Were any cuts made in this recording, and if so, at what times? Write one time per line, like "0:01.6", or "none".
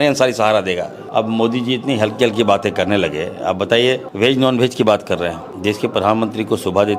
0:01.0
0:04.1
0:05.5